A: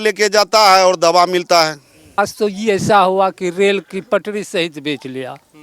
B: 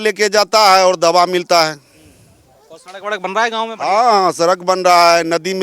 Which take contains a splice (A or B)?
A